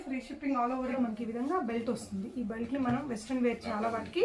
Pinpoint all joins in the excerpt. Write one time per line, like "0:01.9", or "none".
0:00.9